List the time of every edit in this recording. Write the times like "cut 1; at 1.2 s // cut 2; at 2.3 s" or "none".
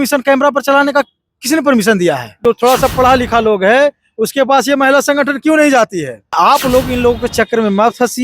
cut 1; at 2.3 s // cut 2; at 6.3 s